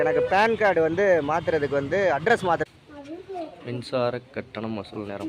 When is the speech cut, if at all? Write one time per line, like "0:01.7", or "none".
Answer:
0:02.6